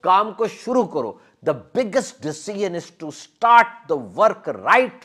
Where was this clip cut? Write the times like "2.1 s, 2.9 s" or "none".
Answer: none